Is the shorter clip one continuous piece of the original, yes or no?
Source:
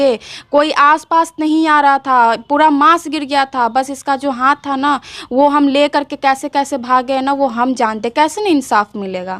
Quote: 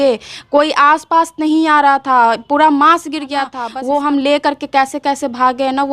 no